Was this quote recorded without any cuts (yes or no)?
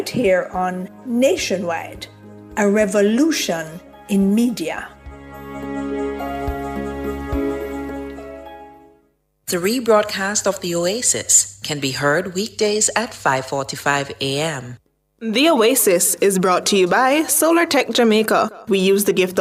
yes